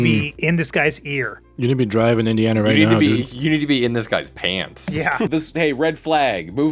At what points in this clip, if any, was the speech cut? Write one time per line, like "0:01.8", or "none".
0:05.3